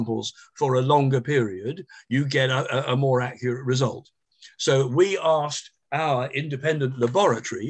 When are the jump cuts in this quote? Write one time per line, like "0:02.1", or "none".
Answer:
none